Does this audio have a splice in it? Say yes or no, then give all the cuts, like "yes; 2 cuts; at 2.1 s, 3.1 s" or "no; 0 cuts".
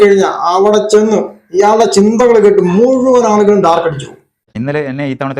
yes; 1 cut; at 4.4 s